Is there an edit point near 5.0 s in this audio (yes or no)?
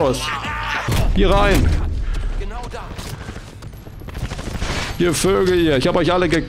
no